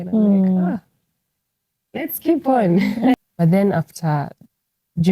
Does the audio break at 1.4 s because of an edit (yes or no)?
no